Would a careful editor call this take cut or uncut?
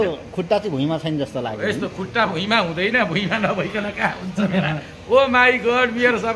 uncut